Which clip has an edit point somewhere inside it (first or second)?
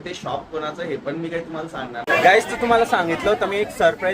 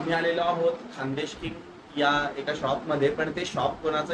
first